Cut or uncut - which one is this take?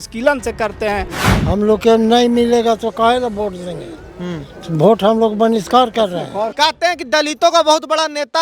cut